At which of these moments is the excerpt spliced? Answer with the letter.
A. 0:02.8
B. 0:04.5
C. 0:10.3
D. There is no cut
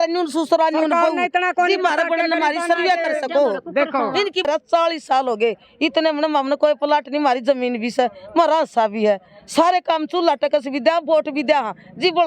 B